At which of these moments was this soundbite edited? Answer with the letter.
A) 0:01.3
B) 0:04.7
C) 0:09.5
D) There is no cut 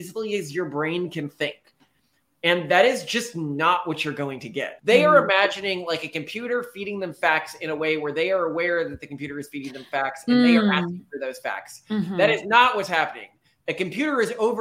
B